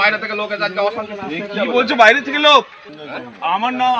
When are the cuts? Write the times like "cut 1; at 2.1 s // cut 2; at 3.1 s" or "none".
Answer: cut 1; at 2.8 s